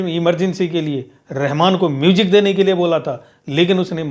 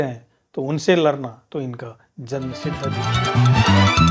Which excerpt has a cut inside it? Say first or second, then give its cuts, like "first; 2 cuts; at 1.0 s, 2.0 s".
second; 1 cut; at 3.0 s